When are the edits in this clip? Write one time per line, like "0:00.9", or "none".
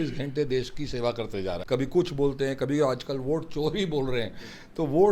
0:01.6